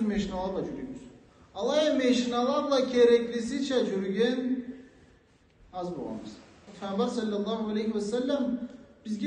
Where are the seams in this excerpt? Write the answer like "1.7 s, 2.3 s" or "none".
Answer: 6.7 s